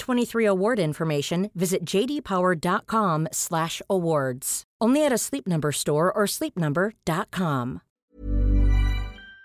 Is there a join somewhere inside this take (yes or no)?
yes